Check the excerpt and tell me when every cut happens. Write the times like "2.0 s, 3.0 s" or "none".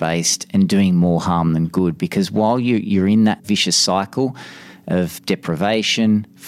3.4 s, 5.2 s